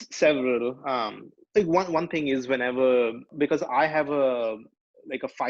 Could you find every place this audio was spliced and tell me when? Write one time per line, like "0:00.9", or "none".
0:03.3